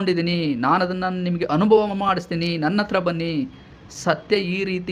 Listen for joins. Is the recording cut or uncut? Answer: uncut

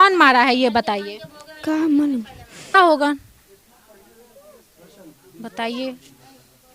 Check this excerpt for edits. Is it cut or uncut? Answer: cut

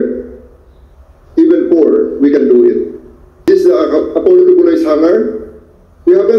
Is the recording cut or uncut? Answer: cut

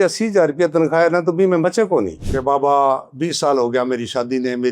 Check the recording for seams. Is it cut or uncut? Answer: cut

